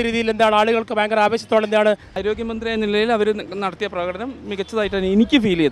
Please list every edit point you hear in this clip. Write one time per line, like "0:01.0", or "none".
0:02.1